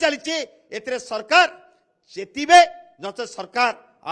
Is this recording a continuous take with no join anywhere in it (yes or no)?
yes